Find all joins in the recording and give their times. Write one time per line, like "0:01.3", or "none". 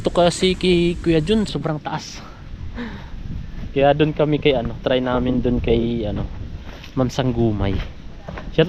0:01.6